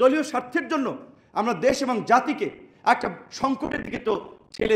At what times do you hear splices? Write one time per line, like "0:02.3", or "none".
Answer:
none